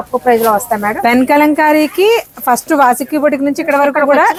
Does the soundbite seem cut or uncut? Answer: uncut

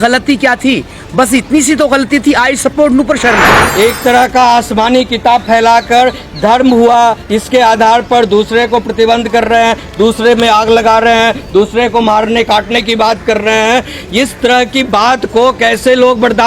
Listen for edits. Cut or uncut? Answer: cut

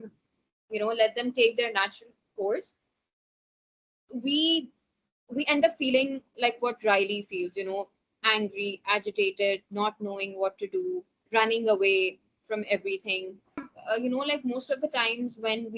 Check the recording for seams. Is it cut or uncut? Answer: cut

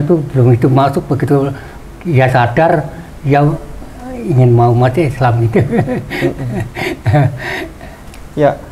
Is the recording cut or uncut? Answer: uncut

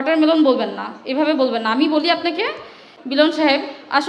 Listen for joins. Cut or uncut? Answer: cut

